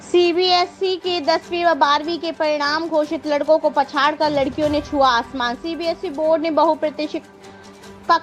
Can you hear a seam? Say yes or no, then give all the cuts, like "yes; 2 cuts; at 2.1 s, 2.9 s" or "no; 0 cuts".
no; 0 cuts